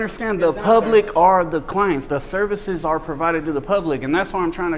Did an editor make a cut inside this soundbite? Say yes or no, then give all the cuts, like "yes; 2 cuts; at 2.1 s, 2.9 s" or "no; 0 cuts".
no; 0 cuts